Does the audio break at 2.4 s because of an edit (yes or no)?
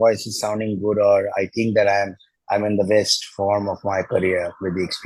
no